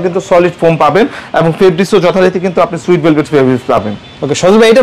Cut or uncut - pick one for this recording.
uncut